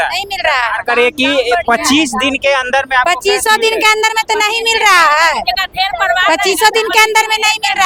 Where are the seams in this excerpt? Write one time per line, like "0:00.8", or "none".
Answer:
none